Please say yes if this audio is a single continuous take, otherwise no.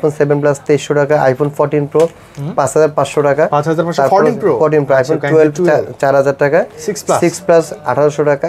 yes